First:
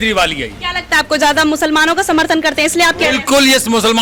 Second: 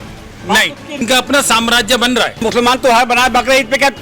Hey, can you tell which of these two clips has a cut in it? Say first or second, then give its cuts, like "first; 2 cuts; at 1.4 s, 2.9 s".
second; 2 cuts; at 1.0 s, 2.4 s